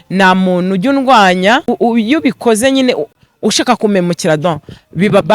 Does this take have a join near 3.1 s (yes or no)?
no